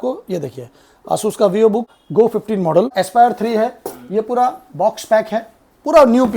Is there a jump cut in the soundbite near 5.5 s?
no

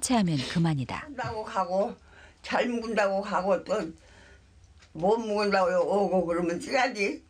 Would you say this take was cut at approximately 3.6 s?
no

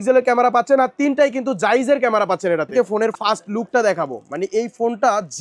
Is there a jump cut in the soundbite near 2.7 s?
yes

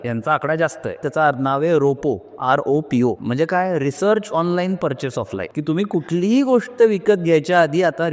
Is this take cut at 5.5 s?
yes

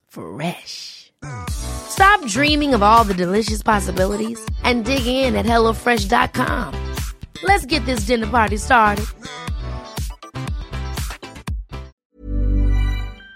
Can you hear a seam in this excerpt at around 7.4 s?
no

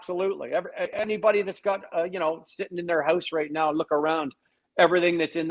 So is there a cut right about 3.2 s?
no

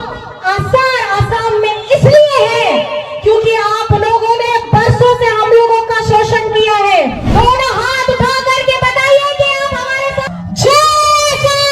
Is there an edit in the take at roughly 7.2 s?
yes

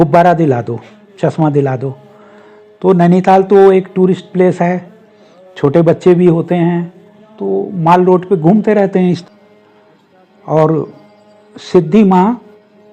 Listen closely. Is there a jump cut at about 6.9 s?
no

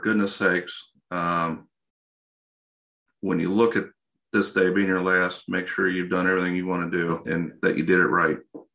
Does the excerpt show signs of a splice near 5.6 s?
no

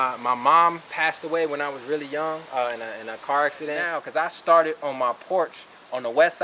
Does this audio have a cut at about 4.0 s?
yes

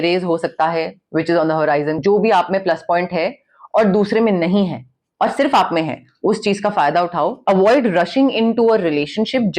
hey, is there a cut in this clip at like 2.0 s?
yes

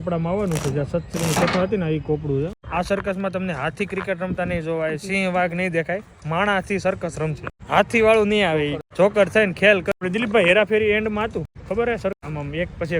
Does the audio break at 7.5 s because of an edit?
yes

